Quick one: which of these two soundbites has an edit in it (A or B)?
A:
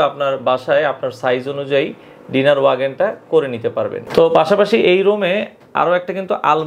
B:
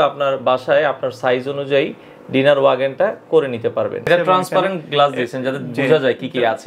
B